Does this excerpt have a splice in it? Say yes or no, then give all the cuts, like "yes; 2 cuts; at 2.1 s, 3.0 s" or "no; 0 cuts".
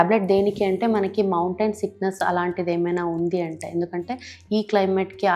no; 0 cuts